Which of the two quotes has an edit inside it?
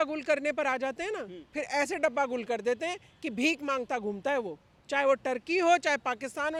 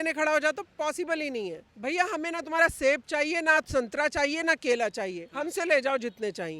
second; 1 cut; at 1.7 s

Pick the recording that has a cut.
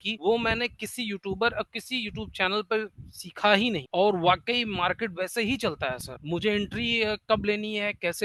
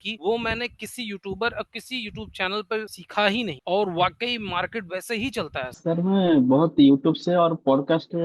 second; 2 cuts; at 3.0 s, 5.7 s

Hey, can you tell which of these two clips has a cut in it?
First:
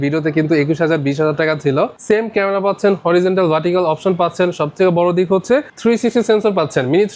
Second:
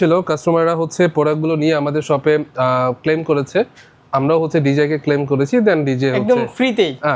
first; 2 cuts; at 2.0 s, 5.7 s

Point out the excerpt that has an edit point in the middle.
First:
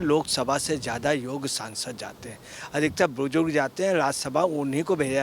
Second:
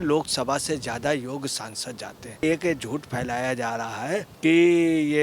second; 2 cuts; at 2.4 s, 4.3 s

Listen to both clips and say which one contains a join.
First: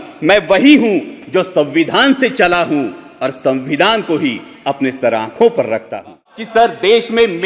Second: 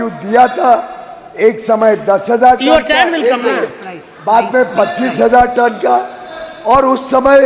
first; 1 cut; at 6.3 s

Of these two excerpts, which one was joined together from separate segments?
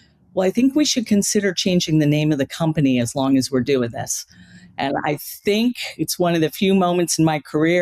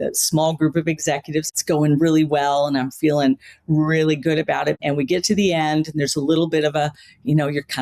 second; 2 cuts; at 1.5 s, 4.8 s

